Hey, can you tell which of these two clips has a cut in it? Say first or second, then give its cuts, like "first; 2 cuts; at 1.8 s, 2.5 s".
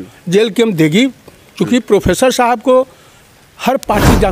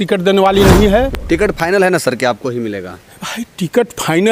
second; 1 cut; at 1.2 s